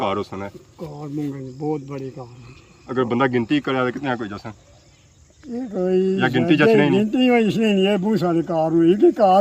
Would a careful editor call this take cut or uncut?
uncut